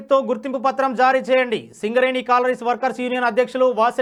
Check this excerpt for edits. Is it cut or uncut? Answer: uncut